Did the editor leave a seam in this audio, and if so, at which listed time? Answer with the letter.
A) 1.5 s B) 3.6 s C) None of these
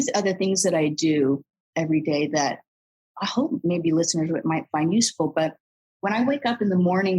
B